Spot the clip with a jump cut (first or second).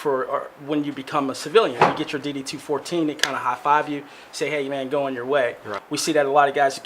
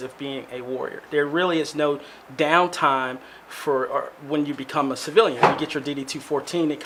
first